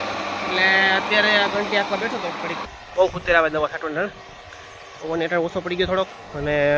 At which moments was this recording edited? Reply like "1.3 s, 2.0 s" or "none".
2.7 s